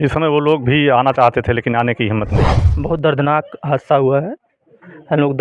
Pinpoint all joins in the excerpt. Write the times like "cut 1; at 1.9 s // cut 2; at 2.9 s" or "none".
cut 1; at 2.6 s